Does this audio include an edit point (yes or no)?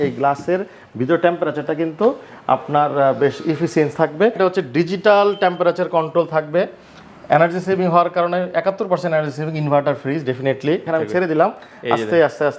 yes